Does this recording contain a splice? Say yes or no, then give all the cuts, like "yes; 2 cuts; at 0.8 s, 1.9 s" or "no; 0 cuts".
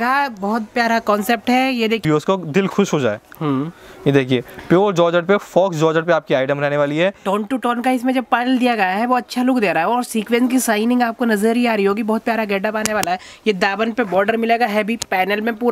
yes; 1 cut; at 2.0 s